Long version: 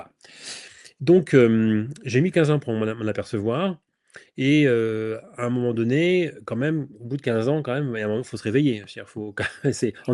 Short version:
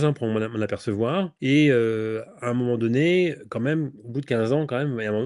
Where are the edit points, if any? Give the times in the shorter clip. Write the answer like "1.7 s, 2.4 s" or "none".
1.3 s